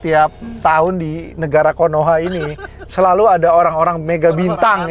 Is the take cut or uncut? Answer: uncut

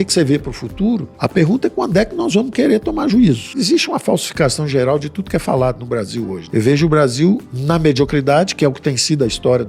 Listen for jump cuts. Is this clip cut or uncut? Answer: cut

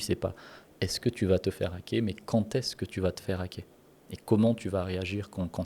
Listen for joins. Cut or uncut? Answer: uncut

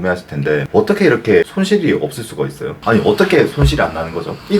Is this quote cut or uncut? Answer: cut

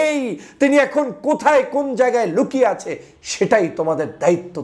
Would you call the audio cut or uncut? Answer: uncut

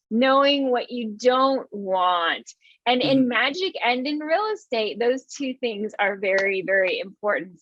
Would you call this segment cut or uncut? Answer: uncut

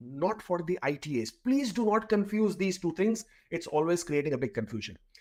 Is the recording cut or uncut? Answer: uncut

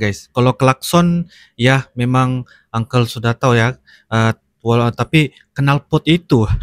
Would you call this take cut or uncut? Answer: uncut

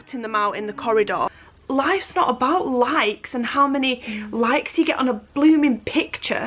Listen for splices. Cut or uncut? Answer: cut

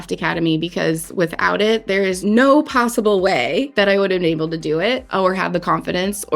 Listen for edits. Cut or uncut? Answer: cut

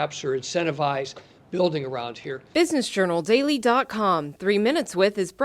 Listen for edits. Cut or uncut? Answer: cut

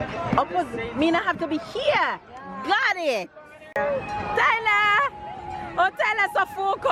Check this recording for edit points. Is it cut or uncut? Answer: cut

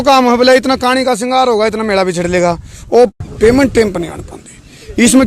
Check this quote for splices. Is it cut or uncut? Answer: cut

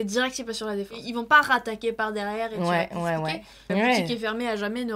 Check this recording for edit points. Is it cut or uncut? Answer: cut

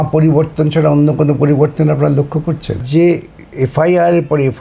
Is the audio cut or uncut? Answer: cut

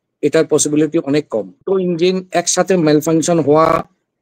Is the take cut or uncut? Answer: cut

